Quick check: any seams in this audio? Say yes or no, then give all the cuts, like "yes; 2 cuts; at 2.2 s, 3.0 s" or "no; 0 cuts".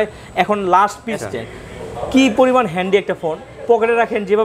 yes; 1 cut; at 1.2 s